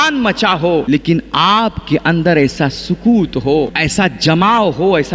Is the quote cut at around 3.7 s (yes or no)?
yes